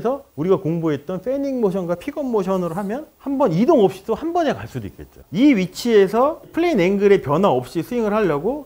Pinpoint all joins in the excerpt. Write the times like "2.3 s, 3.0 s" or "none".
5.2 s

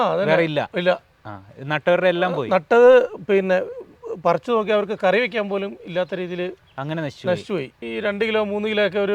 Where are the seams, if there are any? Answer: 7.8 s

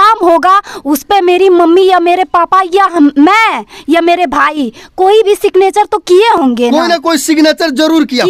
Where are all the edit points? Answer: none

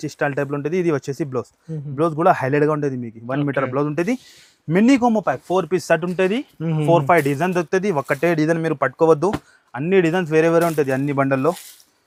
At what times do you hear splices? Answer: none

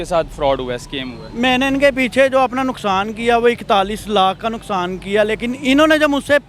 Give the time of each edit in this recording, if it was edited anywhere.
none

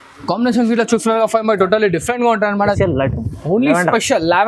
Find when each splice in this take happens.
2.8 s

